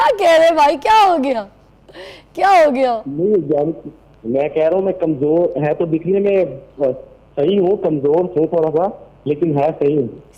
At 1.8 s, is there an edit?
no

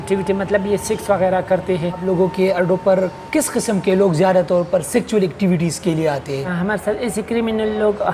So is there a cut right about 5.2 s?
no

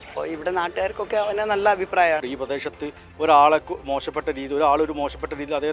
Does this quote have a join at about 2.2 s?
yes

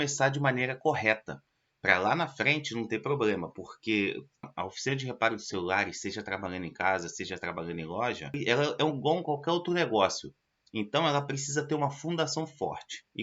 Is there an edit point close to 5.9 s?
no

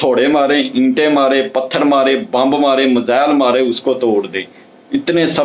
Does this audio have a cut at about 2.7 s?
yes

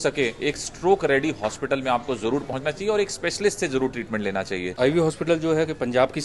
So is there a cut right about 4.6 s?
yes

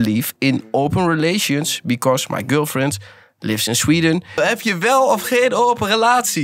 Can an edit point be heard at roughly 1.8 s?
no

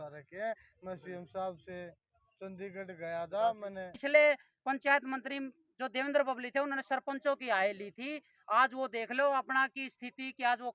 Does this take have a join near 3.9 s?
yes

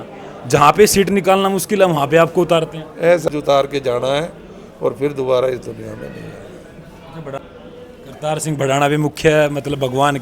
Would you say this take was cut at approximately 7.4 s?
yes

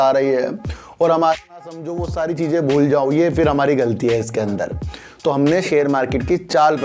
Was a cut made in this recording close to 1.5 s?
yes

